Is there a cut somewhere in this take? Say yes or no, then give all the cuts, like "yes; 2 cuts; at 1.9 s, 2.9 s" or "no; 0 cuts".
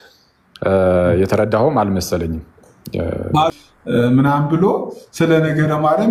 yes; 1 cut; at 3.5 s